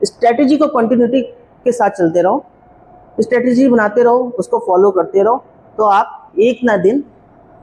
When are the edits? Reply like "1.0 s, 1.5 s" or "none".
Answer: none